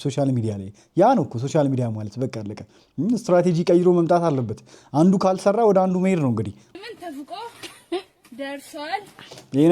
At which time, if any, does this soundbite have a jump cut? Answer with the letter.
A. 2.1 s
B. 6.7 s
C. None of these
B